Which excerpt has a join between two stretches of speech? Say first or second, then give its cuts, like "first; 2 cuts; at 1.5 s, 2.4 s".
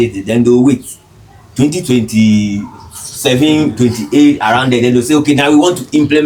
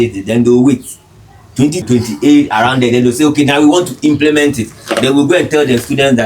second; 1 cut; at 1.8 s